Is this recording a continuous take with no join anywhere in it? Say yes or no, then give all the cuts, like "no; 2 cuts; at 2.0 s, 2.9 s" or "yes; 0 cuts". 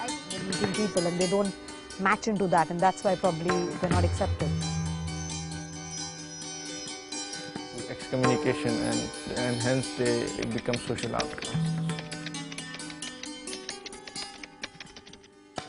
yes; 0 cuts